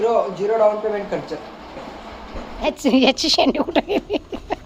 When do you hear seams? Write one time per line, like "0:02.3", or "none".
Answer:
0:02.7